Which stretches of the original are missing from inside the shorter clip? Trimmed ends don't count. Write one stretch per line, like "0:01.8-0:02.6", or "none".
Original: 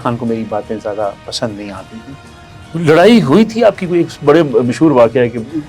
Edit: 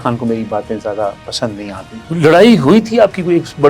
0:01.9-0:02.5